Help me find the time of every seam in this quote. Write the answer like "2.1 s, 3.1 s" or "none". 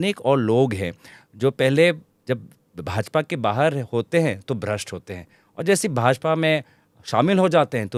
none